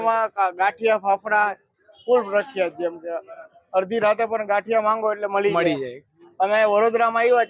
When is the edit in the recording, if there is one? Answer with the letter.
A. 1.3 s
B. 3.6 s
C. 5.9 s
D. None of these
D